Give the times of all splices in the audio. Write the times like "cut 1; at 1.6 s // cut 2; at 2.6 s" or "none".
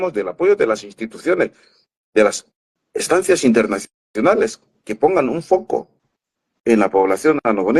none

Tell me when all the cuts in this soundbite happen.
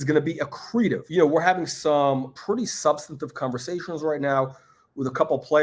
cut 1; at 1.0 s // cut 2; at 2.3 s

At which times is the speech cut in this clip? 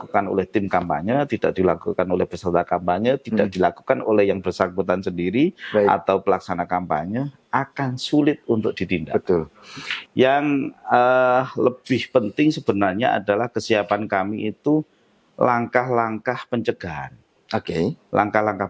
cut 1; at 9.9 s

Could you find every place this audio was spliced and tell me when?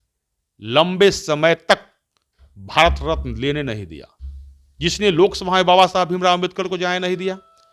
none

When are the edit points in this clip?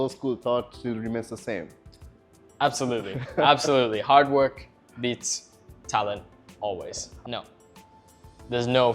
cut 1; at 7.1 s

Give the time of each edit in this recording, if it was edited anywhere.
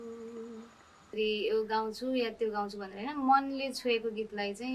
cut 1; at 1.0 s

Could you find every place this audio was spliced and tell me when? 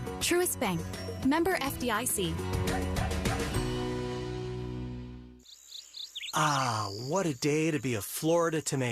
cut 1; at 5.2 s

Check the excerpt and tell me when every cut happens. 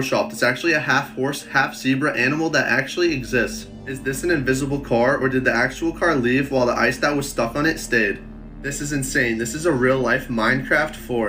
none

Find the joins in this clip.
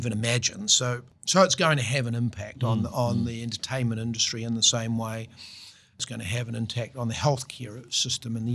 cut 1; at 1.1 s // cut 2; at 5.9 s

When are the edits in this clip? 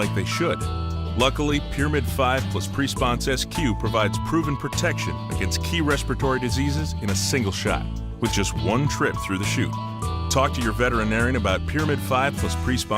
none

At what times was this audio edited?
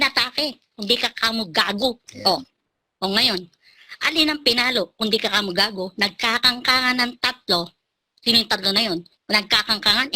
cut 1; at 2.1 s // cut 2; at 9.1 s

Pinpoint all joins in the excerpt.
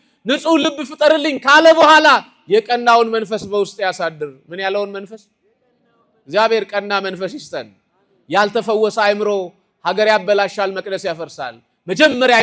none

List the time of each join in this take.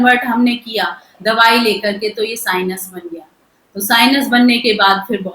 none

